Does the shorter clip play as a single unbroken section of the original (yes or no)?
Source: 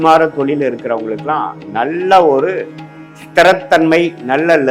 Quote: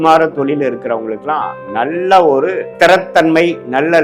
no